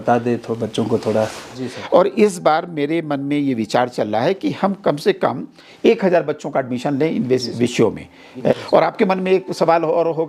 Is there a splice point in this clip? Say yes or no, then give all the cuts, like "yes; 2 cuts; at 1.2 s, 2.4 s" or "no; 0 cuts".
yes; 2 cuts; at 1.5 s, 8.6 s